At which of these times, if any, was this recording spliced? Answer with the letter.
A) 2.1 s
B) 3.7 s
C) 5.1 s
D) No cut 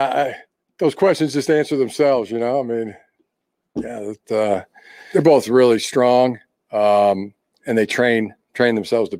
C